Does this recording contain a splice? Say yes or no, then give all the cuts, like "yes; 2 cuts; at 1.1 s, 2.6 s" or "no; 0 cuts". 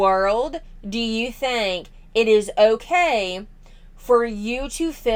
no; 0 cuts